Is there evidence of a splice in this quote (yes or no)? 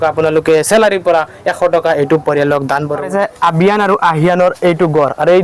yes